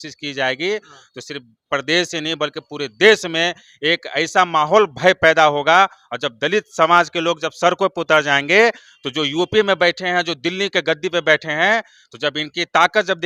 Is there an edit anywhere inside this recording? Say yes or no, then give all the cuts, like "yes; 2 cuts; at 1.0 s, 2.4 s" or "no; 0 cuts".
no; 0 cuts